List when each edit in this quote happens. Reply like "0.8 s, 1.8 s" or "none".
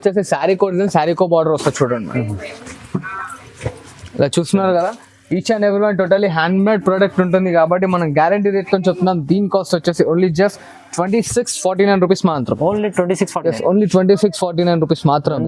none